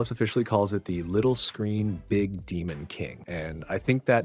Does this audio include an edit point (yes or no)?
yes